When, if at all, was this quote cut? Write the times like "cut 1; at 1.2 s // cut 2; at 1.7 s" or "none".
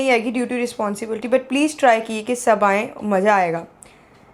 none